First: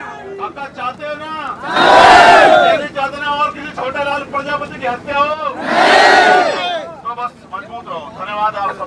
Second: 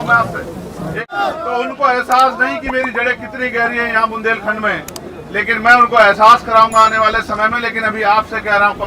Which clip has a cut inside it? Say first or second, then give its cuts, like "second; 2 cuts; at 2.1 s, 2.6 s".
second; 1 cut; at 1.1 s